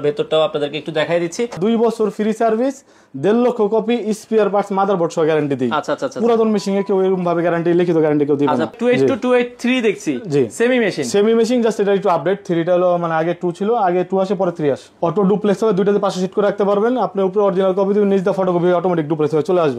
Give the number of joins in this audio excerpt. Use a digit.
3